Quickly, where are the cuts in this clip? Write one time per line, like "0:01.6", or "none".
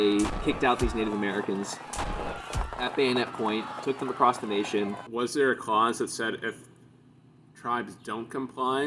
0:05.0